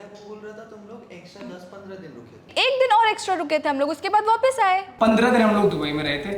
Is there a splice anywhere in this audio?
yes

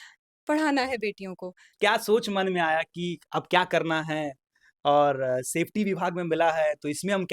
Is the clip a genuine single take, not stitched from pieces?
no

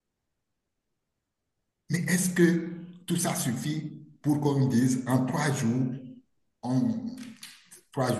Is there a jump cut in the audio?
no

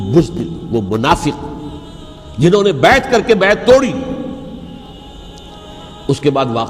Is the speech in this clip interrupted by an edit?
yes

